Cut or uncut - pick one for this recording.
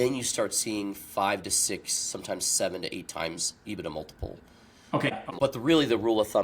cut